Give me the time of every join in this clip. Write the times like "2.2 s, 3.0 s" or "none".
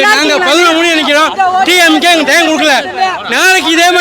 none